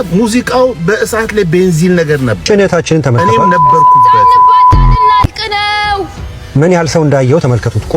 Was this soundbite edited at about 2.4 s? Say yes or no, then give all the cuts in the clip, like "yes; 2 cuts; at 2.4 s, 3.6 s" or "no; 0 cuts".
yes; 1 cut; at 2.4 s